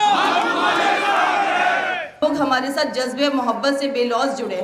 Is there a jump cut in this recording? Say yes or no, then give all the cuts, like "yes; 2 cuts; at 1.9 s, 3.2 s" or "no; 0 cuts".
yes; 1 cut; at 2.2 s